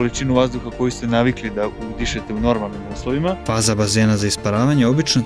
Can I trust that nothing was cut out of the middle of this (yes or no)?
no